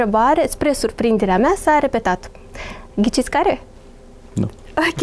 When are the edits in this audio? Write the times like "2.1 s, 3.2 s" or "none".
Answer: none